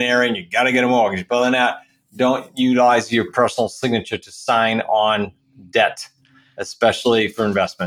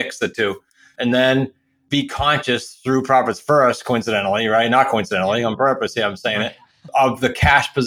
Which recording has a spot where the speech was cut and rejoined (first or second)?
second